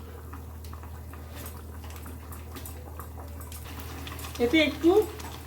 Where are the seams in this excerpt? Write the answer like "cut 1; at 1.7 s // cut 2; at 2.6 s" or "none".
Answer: cut 1; at 3.6 s